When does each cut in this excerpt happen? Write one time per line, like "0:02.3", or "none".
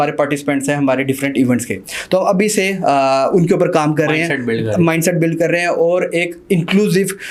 none